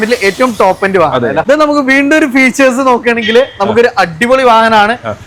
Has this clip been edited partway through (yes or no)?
no